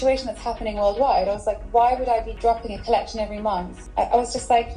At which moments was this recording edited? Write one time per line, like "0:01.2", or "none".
0:02.3
0:03.8